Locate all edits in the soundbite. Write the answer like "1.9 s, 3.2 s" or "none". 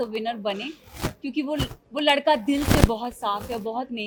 none